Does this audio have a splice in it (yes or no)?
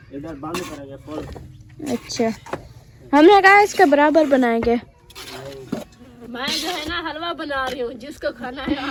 no